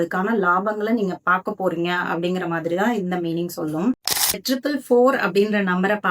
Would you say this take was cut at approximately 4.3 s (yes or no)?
yes